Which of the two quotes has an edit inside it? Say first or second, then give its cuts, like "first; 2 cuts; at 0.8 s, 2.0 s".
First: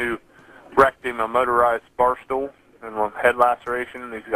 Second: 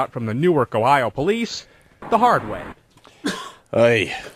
first; 1 cut; at 1.9 s